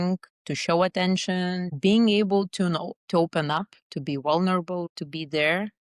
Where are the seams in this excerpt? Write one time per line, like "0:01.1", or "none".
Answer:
0:01.7

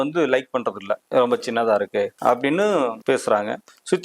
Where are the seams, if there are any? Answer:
0:00.9
0:02.1
0:03.0

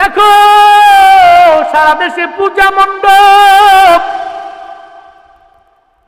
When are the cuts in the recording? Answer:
none

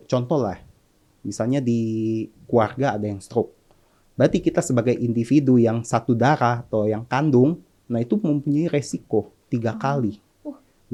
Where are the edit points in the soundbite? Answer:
none

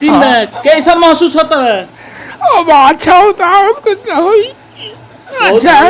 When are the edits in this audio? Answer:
none

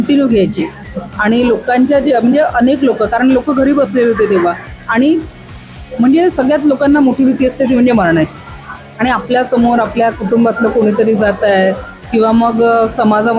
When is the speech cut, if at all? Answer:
none

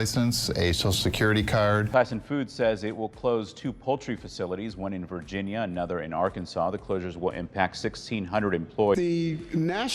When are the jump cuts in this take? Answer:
0:01.9
0:09.0

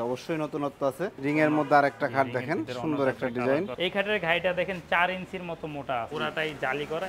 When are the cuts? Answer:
0:01.2
0:03.7
0:06.1

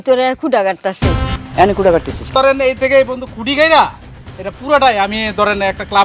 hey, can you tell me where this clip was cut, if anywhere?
0:01.3
0:02.3

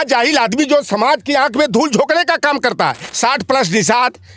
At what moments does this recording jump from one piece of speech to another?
0:03.0

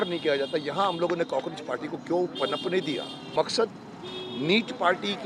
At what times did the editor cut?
0:03.3

